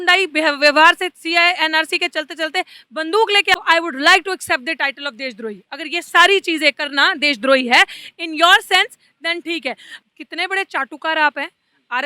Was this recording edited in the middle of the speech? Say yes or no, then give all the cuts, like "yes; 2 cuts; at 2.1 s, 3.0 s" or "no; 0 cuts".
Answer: yes; 2 cuts; at 3.5 s, 9.9 s